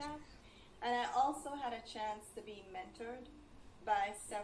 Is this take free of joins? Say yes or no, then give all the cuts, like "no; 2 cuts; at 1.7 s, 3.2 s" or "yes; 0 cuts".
yes; 0 cuts